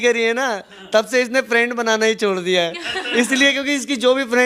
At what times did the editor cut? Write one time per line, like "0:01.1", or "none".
none